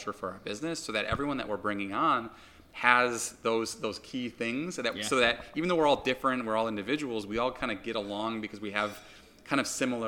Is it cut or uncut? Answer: uncut